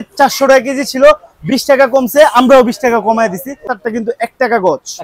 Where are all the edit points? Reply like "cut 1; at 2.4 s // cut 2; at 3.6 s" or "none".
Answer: cut 1; at 3.6 s